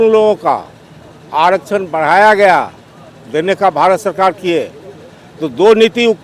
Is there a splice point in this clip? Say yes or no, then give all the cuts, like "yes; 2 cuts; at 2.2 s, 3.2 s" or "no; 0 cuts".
no; 0 cuts